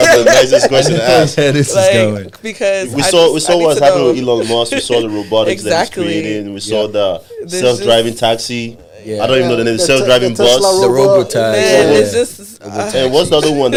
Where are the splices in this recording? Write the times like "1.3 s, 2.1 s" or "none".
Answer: none